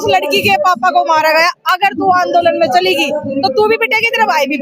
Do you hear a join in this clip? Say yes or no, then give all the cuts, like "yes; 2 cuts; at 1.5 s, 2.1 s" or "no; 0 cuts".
no; 0 cuts